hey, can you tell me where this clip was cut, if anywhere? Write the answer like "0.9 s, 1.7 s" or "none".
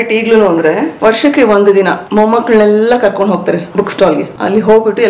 0.9 s, 2.0 s, 4.2 s